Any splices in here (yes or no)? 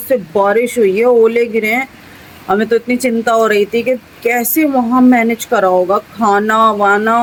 no